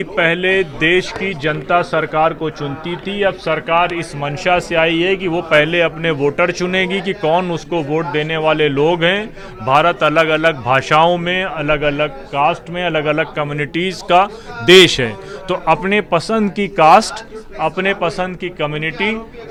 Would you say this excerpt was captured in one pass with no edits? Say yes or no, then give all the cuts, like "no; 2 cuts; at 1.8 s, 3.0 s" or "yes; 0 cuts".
yes; 0 cuts